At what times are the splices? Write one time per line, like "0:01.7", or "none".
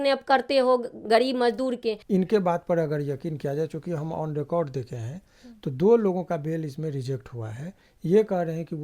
0:02.0